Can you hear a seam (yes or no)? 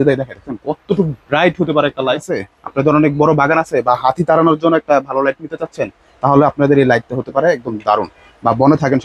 yes